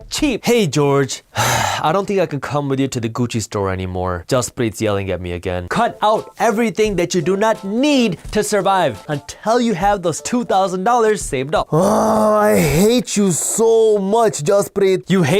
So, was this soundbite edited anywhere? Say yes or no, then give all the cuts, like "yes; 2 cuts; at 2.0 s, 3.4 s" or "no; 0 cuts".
yes; 4 cuts; at 1.2 s, 4.2 s, 9.0 s, 11.7 s